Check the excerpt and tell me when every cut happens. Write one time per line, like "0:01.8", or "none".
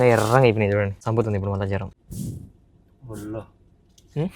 0:01.0
0:02.0